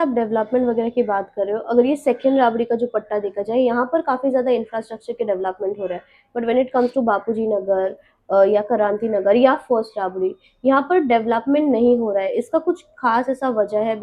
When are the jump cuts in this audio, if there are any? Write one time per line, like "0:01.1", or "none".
none